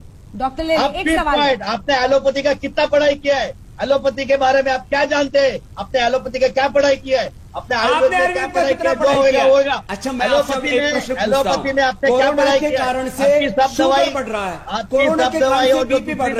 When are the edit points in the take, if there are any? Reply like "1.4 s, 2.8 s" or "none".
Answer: none